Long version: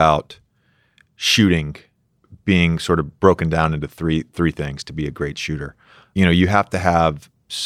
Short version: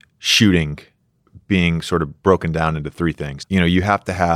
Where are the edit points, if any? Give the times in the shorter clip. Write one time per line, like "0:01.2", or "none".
0:03.0